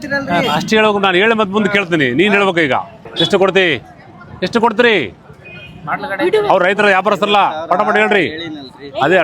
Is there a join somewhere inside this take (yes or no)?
yes